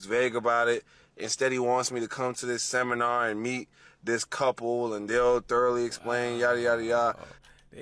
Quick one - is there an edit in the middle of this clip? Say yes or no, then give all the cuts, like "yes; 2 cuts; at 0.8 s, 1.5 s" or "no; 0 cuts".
no; 0 cuts